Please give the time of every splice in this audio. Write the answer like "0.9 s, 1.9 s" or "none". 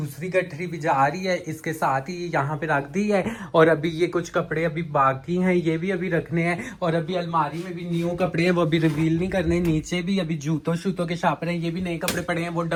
none